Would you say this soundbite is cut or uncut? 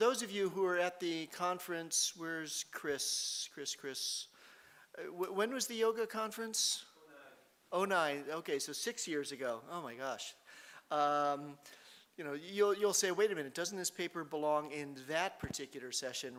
uncut